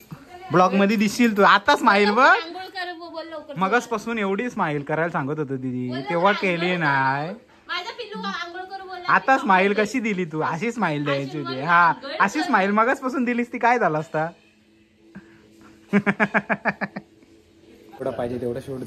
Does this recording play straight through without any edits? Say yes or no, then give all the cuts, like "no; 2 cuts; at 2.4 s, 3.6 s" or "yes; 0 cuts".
yes; 0 cuts